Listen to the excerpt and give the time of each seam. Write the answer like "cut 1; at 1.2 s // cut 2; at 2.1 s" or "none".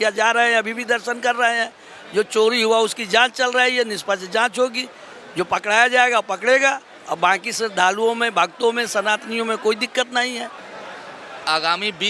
cut 1; at 10.6 s